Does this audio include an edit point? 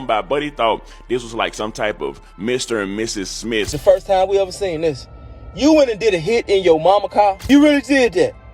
yes; 2 cuts; at 3.8 s, 7.5 s

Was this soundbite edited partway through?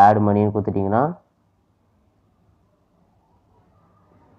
no; 0 cuts

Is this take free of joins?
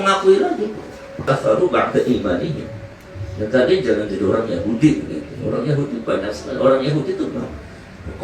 no; 1 cut; at 1.2 s

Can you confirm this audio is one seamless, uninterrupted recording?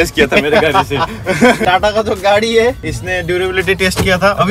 no; 1 cut; at 1.6 s

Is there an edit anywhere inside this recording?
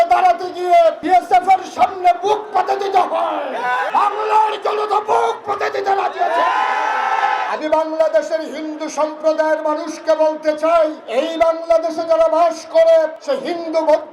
yes; 5 cuts; at 1.0 s, 3.9 s, 7.4 s, 11.0 s, 13.2 s

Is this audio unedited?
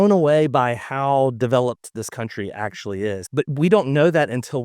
no; 1 cut; at 3.2 s

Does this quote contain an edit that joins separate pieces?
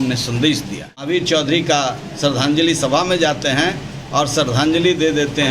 yes; 1 cut; at 0.9 s

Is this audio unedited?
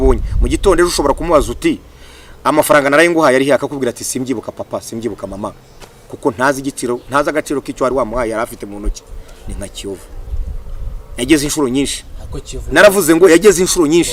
yes; 0 cuts

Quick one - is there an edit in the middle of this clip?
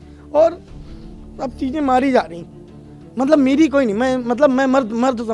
no; 0 cuts

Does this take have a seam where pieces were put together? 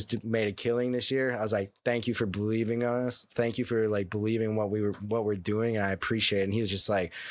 no; 0 cuts

